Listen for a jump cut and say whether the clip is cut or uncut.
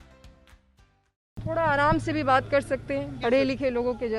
cut